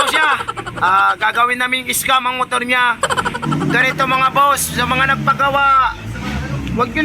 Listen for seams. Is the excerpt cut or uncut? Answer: cut